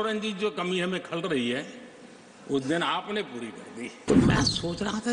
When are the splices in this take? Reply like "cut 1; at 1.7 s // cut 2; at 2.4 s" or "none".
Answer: cut 1; at 4.0 s